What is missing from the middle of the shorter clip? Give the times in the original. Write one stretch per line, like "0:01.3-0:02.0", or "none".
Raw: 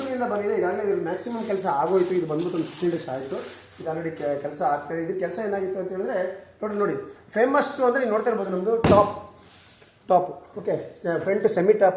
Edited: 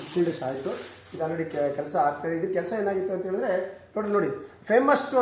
none